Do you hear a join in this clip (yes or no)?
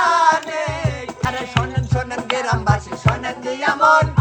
yes